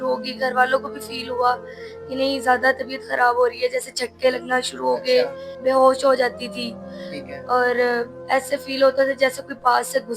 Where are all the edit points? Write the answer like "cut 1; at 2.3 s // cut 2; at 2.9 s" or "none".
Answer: cut 1; at 5.5 s